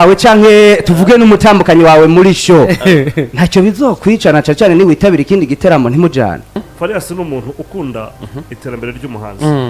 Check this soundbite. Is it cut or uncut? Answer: cut